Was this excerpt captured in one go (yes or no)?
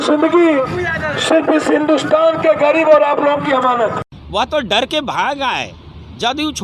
no